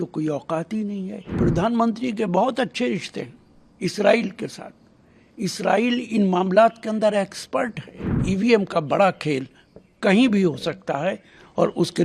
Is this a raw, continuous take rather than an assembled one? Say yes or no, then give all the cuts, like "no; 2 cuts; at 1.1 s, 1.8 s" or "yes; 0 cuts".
no; 2 cuts; at 1.3 s, 8.2 s